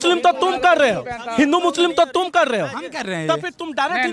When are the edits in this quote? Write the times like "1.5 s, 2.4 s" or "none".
none